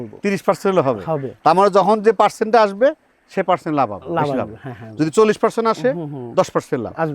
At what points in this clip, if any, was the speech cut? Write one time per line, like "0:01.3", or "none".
none